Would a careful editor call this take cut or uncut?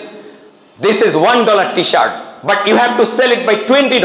uncut